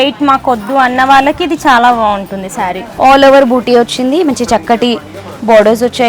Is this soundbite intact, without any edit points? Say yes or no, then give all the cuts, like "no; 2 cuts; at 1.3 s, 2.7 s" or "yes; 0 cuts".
no; 1 cut; at 2.8 s